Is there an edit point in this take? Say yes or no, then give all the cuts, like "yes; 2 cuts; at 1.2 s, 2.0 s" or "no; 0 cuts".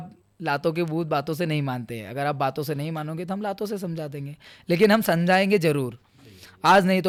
no; 0 cuts